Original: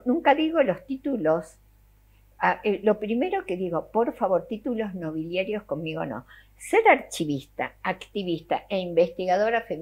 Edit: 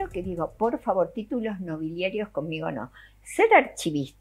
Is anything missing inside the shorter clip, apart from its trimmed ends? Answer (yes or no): no